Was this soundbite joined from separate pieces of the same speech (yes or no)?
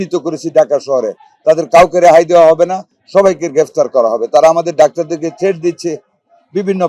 no